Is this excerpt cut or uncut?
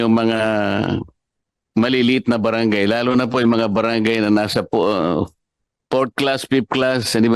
uncut